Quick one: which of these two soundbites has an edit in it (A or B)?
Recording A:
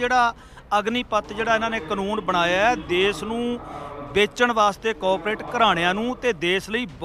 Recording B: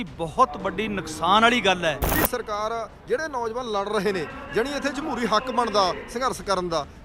B